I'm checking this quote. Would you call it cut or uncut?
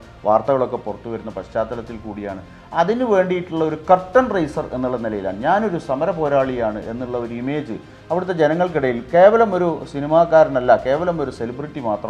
uncut